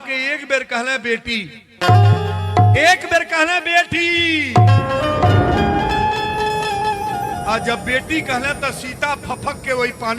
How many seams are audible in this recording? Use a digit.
0